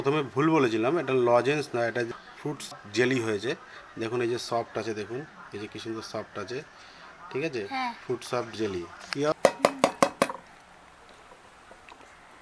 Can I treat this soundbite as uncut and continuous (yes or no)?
no